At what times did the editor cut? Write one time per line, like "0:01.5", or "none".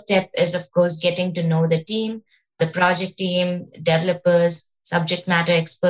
0:02.6